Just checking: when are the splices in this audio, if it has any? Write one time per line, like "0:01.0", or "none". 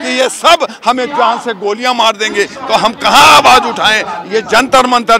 none